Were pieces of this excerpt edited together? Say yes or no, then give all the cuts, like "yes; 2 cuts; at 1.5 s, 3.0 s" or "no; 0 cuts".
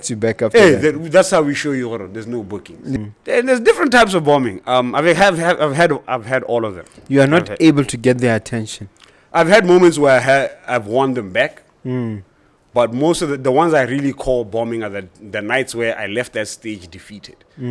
yes; 1 cut; at 3.0 s